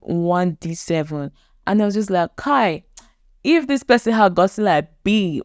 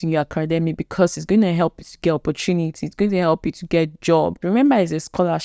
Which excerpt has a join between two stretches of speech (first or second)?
second